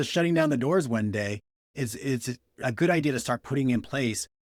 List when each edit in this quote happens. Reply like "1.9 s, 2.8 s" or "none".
none